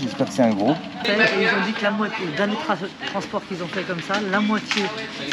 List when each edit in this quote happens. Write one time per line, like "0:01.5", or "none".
0:01.0